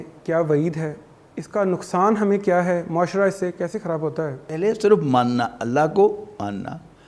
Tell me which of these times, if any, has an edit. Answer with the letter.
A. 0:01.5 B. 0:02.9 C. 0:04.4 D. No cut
C